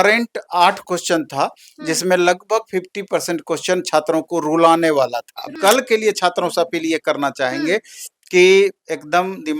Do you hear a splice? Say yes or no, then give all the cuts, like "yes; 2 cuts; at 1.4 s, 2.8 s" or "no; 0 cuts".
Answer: yes; 1 cut; at 5.5 s